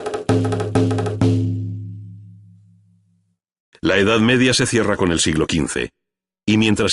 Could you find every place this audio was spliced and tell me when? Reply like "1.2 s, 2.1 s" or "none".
none